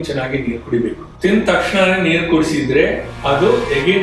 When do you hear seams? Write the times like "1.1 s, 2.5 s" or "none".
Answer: 1.1 s

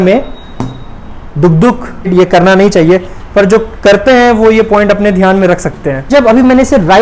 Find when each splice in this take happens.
2.1 s, 6.0 s

